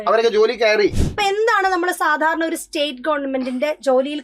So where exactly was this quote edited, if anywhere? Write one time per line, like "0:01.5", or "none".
0:01.0